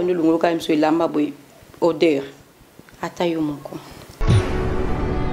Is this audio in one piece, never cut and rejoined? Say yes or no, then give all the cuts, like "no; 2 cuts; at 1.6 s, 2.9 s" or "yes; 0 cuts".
no; 1 cut; at 4.1 s